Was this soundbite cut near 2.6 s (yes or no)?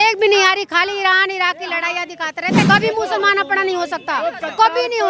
yes